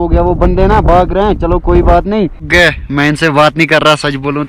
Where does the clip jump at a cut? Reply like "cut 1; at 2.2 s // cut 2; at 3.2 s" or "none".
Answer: cut 1; at 2.5 s